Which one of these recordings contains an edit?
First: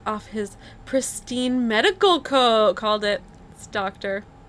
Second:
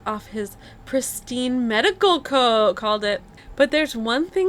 second; 1 cut; at 3.4 s

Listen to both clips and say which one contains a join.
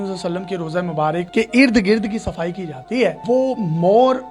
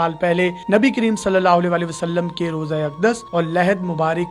first; 2 cuts; at 1.3 s, 3.2 s

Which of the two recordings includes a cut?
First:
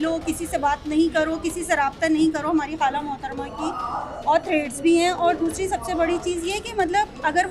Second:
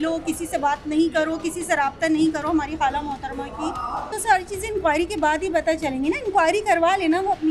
second; 1 cut; at 4.2 s

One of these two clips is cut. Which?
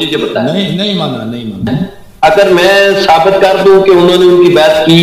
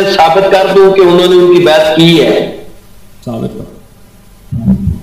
first; 1 cut; at 2.0 s

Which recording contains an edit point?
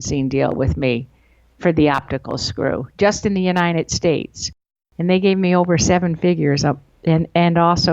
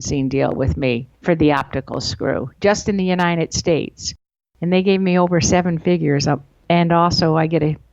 second; 2 cuts; at 1.1 s, 6.6 s

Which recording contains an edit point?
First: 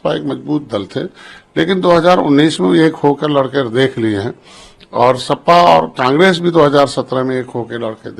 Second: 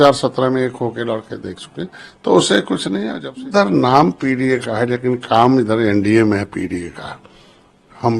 second; 1 cut; at 3.2 s

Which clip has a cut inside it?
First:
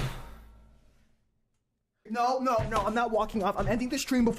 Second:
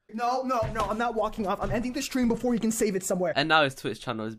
second; 1 cut; at 3.3 s

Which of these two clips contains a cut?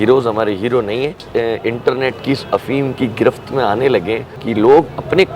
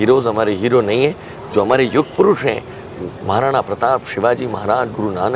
first; 2 cuts; at 1.2 s, 4.3 s

